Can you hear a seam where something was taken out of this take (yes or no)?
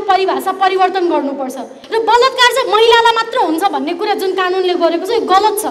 yes